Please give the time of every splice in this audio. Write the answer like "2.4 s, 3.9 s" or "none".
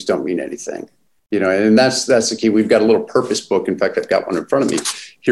none